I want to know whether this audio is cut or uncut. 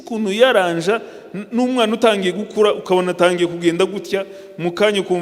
uncut